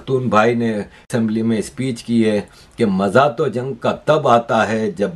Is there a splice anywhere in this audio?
yes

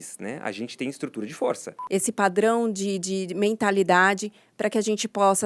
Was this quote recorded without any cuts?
no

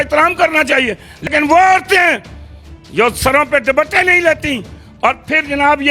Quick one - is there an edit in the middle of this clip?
yes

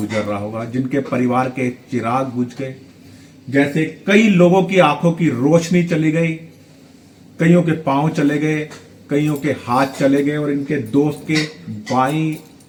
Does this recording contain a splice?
no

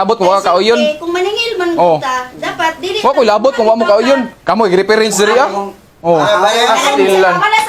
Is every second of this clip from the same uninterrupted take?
yes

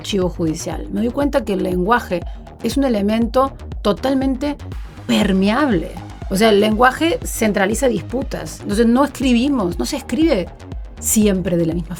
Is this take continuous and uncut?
yes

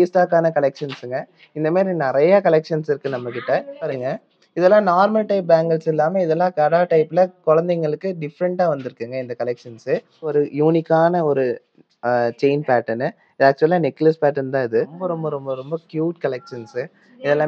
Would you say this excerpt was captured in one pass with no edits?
no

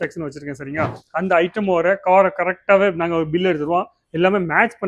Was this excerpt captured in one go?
no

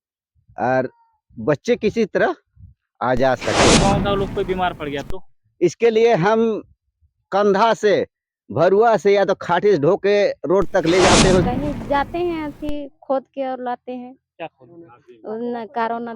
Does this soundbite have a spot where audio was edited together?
yes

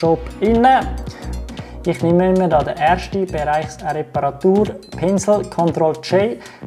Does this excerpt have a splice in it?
yes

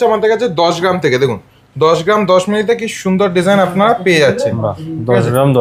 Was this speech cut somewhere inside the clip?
no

